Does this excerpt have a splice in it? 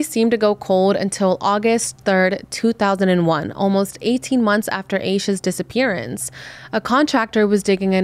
no; 0 cuts

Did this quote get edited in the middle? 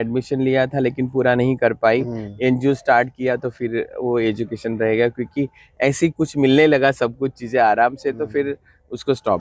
no; 0 cuts

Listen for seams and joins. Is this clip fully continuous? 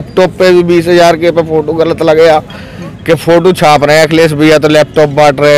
yes; 0 cuts

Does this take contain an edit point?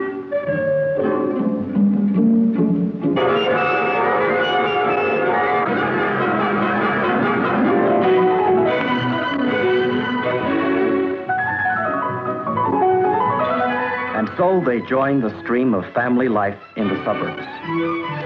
no; 0 cuts

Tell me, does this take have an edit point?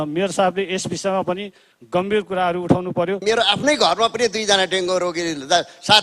yes; 1 cut; at 3.2 s

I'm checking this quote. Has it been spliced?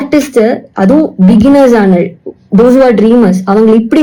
no; 0 cuts

